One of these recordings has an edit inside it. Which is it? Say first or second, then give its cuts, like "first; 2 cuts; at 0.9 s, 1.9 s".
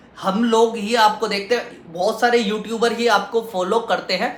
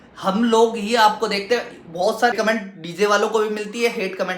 second; 1 cut; at 2.3 s